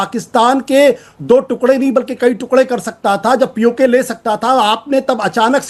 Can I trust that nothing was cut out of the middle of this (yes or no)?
yes